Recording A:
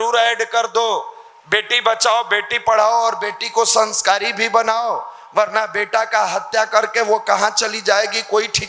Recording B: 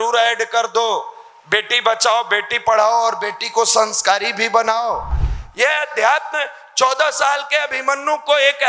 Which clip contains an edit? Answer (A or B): B